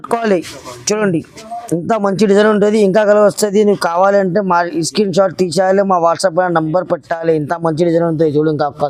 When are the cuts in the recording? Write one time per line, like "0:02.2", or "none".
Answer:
none